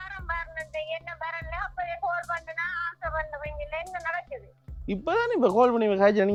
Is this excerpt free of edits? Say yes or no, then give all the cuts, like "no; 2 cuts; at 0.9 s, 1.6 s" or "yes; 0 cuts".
yes; 0 cuts